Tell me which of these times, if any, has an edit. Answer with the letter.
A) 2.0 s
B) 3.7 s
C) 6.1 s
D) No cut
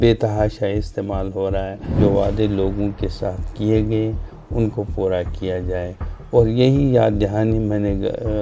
A